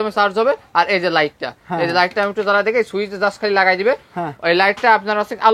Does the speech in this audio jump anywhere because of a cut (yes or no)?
no